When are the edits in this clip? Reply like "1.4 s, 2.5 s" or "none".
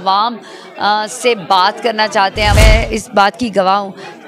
2.5 s